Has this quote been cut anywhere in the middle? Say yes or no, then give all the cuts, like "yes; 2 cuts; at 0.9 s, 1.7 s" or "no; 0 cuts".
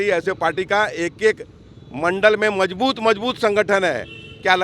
no; 0 cuts